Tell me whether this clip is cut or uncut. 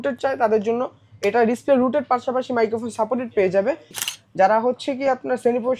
cut